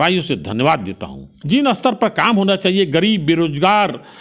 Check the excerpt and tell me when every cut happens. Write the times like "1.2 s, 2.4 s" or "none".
1.3 s